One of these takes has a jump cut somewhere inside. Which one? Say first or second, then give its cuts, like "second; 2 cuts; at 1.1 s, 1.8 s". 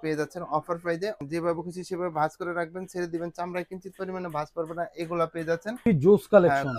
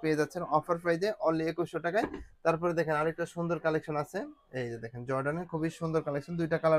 first; 2 cuts; at 1.2 s, 5.9 s